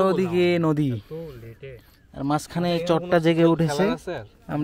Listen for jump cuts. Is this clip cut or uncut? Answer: uncut